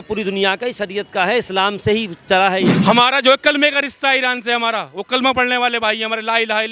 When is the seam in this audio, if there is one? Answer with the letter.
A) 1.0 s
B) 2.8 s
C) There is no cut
B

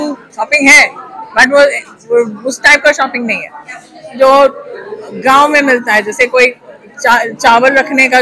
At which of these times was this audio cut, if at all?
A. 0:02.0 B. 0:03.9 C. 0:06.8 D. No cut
D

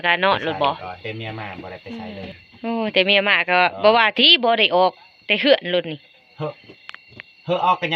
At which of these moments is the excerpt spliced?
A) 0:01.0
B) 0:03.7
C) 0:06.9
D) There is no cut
A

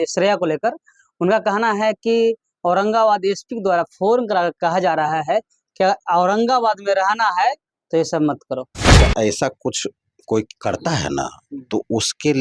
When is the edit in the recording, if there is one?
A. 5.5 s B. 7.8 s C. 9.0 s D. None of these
C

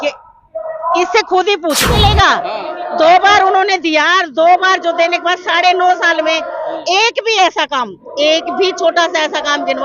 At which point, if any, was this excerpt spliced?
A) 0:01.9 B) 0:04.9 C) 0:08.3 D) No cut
A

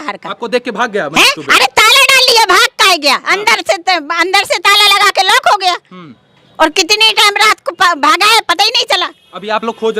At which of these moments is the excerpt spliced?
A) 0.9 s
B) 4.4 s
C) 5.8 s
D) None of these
D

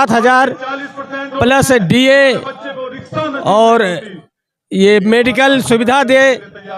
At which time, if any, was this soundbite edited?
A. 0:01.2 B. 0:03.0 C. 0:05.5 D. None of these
D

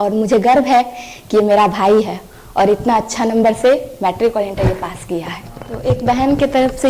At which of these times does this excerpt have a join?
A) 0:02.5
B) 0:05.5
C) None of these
B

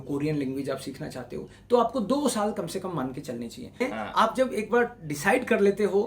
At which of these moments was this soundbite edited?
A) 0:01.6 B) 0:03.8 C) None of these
B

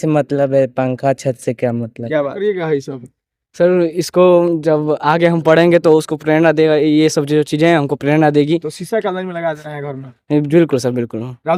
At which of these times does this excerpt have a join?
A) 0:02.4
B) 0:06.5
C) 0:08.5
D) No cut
A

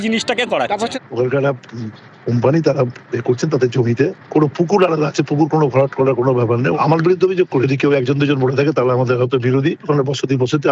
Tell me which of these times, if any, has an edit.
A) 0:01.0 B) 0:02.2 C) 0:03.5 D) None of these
A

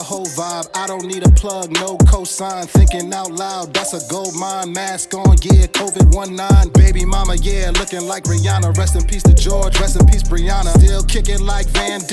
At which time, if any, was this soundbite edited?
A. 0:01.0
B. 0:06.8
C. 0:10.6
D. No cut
D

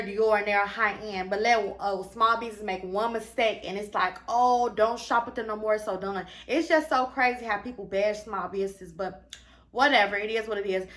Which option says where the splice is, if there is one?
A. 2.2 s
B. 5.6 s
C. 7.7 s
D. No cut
D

